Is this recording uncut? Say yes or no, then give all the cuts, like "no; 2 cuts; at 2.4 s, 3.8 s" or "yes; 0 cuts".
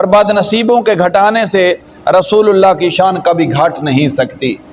yes; 0 cuts